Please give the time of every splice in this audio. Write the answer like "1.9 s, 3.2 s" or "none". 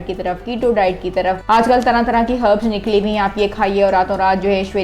1.4 s